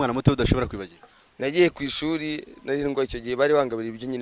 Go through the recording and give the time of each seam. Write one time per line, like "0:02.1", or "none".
none